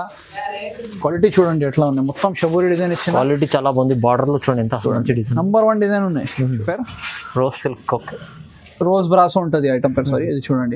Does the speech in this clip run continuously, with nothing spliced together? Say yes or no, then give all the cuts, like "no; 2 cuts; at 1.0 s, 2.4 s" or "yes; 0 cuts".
no; 1 cut; at 6.6 s